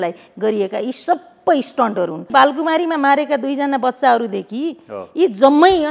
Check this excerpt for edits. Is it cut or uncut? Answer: cut